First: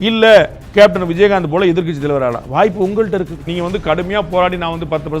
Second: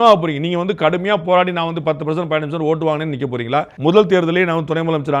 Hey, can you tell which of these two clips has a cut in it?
first; 1 cut; at 3.4 s

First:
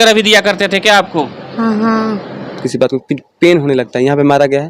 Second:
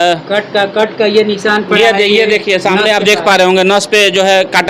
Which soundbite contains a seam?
first; 1 cut; at 2.7 s

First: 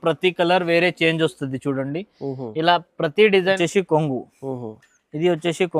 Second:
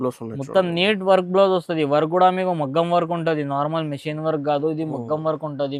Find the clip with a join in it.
first; 1 cut; at 3.6 s

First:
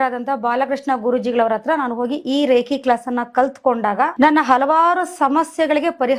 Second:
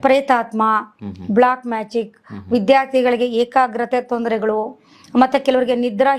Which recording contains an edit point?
first; 1 cut; at 4.1 s

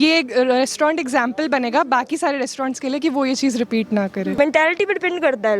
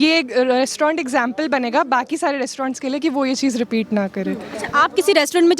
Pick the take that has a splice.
first; 1 cut; at 4.3 s

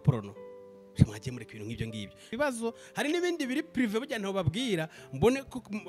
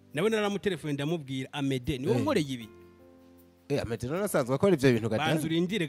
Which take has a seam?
first; 1 cut; at 2.2 s

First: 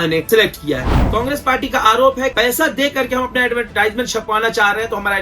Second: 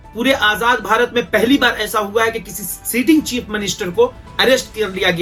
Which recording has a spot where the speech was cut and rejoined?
first; 3 cuts; at 1.0 s, 2.3 s, 3.7 s

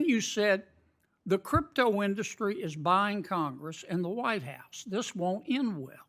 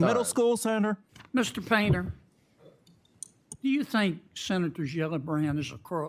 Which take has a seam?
second; 1 cut; at 1.1 s

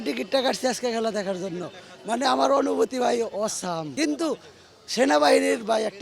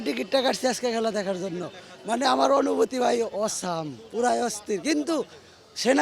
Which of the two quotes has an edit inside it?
first; 1 cut; at 3.9 s

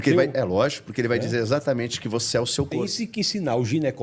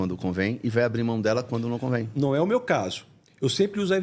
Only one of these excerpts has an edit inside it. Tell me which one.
first; 1 cut; at 2.9 s

